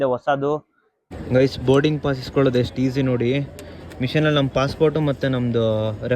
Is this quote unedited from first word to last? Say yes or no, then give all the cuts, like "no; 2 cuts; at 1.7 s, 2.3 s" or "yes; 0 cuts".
no; 1 cut; at 1.0 s